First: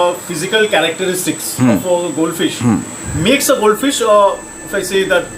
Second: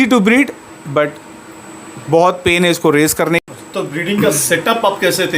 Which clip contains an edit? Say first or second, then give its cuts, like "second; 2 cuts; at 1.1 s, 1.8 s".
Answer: second; 1 cut; at 3.4 s